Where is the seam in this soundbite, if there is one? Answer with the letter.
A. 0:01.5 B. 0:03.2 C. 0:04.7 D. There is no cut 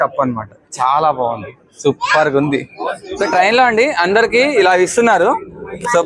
B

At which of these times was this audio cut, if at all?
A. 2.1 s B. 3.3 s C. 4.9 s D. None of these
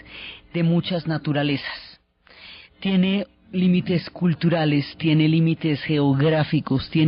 A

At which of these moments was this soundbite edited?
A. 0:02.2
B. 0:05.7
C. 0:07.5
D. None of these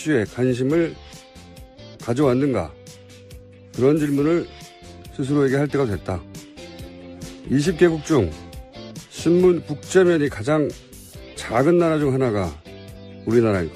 D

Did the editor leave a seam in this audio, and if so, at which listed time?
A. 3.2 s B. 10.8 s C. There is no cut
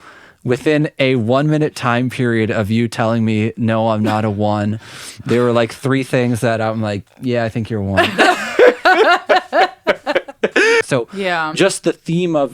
B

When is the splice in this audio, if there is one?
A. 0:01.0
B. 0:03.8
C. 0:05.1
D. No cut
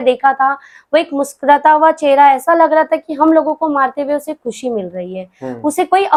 D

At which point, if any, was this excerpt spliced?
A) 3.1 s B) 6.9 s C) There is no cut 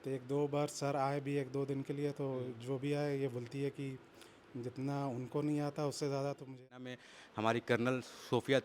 B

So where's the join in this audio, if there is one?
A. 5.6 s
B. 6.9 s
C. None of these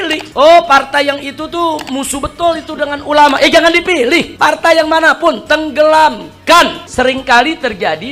B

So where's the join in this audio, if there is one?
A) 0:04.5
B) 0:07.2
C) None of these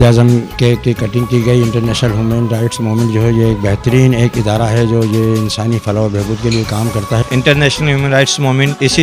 B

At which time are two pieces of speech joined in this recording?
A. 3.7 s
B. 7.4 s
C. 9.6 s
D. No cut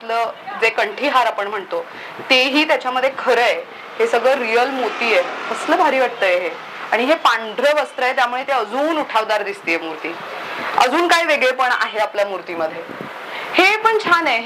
D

